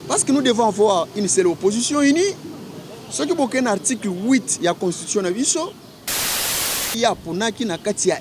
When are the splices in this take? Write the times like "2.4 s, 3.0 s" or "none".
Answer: 6.3 s